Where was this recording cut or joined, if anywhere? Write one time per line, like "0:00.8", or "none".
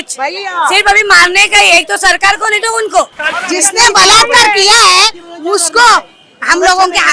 0:03.3